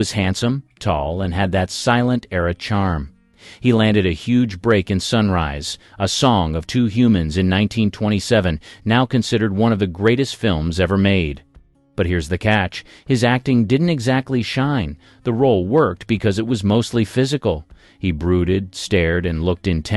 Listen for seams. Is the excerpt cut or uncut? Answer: cut